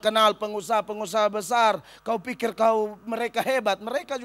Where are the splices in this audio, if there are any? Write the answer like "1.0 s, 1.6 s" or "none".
none